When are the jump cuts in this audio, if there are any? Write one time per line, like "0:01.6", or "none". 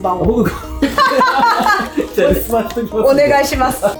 none